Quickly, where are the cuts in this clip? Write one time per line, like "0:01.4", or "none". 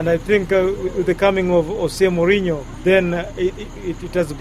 none